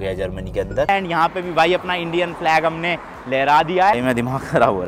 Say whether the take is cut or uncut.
cut